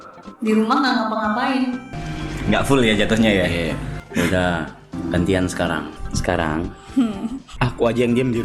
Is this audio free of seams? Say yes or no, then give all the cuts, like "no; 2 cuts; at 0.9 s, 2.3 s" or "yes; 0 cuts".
no; 5 cuts; at 1.9 s, 3.9 s, 4.8 s, 6.0 s, 7.4 s